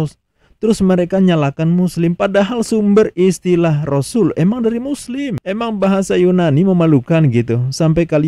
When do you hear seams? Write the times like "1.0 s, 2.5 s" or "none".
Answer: 5.3 s